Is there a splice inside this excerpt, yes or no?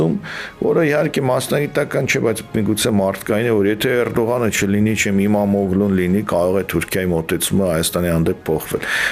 no